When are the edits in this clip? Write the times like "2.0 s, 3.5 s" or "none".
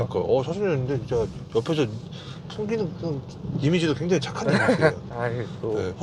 none